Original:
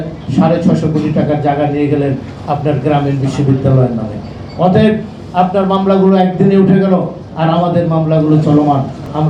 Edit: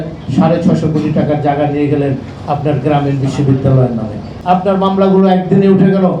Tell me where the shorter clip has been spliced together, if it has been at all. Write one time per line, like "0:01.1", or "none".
0:04.3